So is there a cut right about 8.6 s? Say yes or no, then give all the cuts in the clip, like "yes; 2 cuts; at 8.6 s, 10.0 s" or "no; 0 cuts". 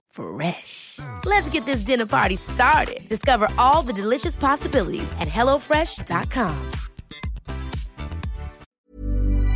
yes; 1 cut; at 8.6 s